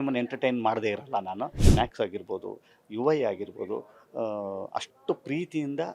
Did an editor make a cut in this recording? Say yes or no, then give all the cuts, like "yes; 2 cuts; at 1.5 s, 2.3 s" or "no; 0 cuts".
yes; 1 cut; at 1.6 s